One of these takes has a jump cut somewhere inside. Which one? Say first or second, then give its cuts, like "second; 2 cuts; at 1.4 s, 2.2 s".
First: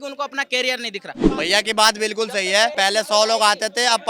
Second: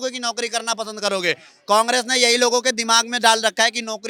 first; 2 cuts; at 1.2 s, 2.7 s